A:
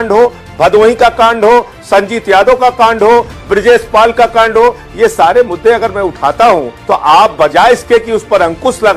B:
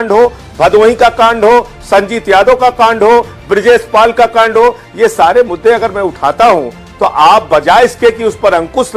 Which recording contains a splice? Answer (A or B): A